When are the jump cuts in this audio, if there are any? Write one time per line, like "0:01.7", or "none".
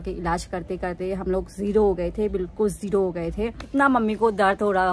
0:03.6